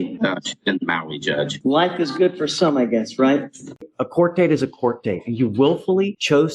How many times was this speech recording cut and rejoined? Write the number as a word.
two